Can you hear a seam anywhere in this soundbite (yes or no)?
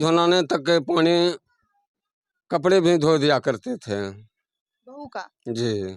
no